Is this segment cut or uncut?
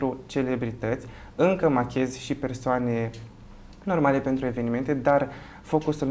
uncut